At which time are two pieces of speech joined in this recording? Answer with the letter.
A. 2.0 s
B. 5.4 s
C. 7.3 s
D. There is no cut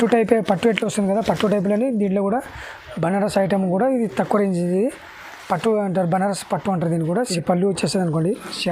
C